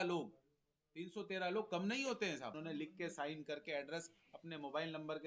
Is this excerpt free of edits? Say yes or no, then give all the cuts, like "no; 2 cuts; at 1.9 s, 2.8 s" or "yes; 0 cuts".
no; 1 cut; at 2.6 s